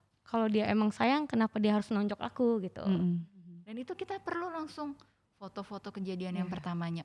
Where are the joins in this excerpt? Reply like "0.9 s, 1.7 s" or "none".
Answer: 3.7 s